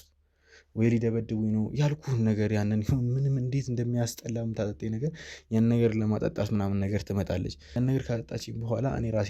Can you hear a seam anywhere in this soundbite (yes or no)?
yes